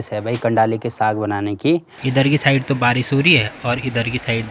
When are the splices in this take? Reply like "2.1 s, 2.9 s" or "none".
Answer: 1.9 s